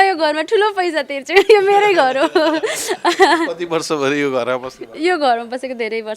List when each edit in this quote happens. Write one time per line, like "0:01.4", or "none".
none